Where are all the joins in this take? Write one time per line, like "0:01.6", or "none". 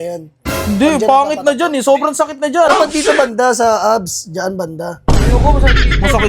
0:02.7